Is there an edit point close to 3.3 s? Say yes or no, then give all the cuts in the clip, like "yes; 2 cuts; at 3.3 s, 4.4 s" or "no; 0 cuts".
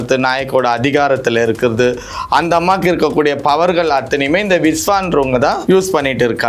no; 1 cut; at 5.6 s